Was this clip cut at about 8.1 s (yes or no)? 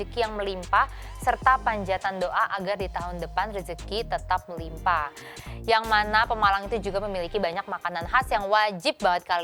no